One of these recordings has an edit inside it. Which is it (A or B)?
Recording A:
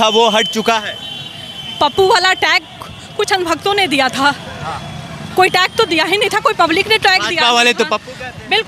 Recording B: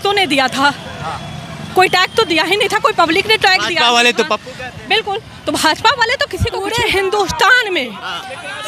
B